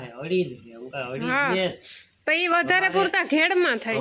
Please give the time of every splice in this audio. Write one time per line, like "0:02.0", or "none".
none